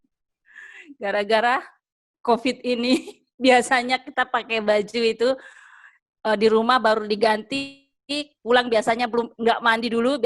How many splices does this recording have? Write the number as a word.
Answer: zero